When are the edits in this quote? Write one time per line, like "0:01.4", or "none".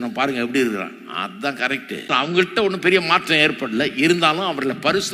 0:02.1